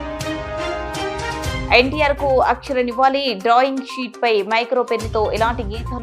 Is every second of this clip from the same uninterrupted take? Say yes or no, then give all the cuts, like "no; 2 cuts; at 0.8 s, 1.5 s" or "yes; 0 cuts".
no; 1 cut; at 1.0 s